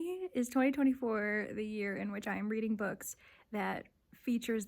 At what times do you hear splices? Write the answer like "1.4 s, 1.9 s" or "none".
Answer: none